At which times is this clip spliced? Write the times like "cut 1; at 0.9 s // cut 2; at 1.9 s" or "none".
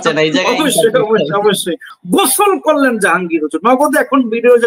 cut 1; at 1.9 s